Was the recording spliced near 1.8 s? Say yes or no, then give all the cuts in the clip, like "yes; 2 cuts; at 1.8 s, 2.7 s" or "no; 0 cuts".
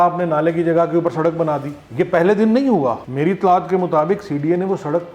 no; 1 cut; at 3.0 s